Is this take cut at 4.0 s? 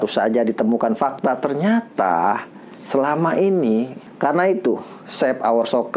yes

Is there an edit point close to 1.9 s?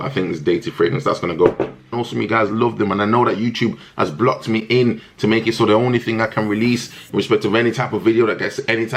yes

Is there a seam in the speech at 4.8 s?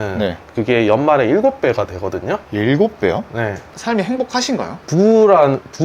yes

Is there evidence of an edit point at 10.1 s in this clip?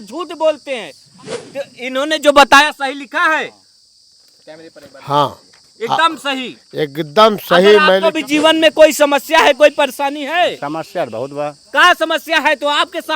no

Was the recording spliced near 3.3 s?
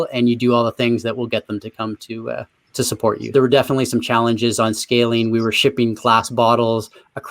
yes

